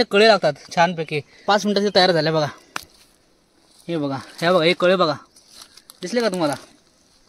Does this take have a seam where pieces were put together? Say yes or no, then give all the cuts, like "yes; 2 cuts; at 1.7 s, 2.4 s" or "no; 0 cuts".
yes; 1 cut; at 1.4 s